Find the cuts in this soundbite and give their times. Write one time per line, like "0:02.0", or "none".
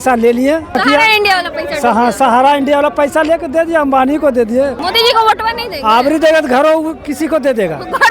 0:00.8
0:04.8